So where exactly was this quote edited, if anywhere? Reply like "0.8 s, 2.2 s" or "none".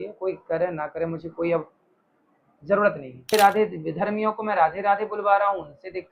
3.3 s